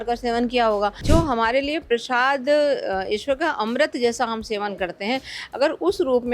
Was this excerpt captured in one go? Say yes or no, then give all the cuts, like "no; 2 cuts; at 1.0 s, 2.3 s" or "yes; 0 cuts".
no; 1 cut; at 1.0 s